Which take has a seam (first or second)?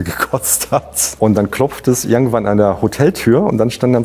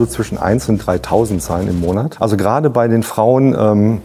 first